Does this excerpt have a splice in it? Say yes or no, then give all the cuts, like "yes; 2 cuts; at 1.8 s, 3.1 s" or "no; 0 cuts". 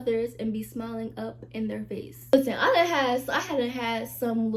yes; 1 cut; at 2.2 s